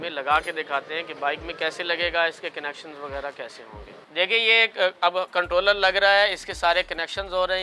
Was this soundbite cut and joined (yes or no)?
no